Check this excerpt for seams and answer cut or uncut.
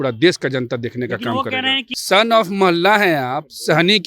cut